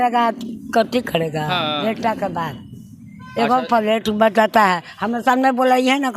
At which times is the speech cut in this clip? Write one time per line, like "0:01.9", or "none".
none

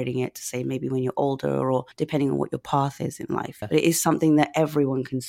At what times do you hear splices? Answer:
0:01.9
0:03.6

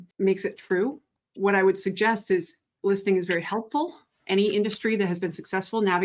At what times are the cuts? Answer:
0:01.1

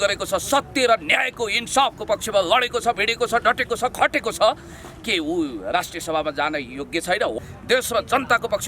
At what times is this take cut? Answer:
0:07.3

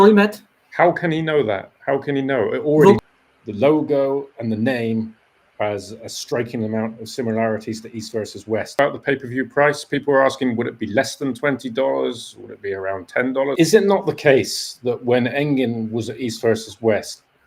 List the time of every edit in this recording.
0:03.0
0:08.7
0:13.6

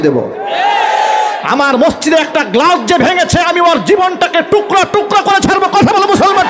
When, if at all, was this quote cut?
none

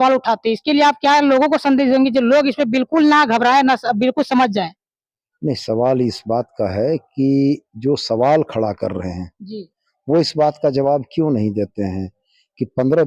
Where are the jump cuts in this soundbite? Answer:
none

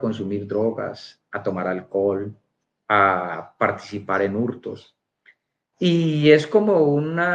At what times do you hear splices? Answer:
none

